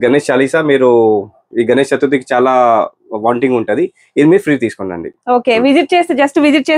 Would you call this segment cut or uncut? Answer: uncut